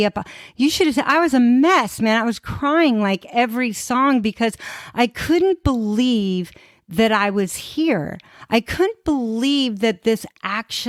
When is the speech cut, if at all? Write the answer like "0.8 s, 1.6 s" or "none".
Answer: none